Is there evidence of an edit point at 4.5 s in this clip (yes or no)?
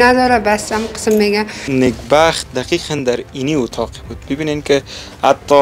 no